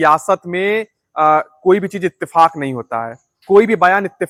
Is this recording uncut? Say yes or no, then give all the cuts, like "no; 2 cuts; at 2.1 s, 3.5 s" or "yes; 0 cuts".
yes; 0 cuts